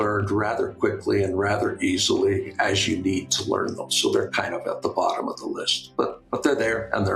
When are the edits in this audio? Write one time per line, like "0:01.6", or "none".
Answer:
none

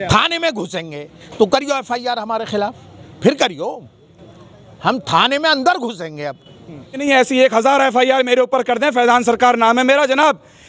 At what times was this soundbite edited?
0:07.0

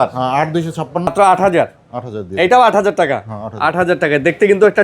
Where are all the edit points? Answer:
0:01.1

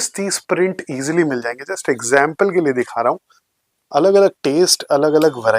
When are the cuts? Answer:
none

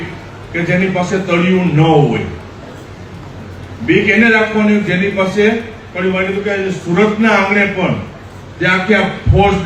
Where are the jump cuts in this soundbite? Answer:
none

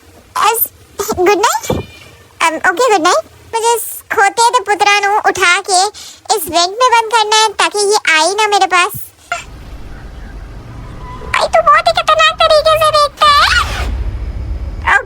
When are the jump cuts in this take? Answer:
0:03.5
0:09.4

